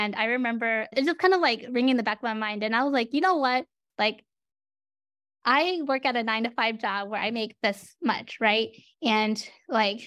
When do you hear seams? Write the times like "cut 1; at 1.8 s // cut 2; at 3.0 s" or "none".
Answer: none